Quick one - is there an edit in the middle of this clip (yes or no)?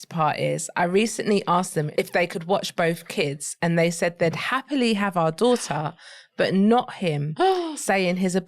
yes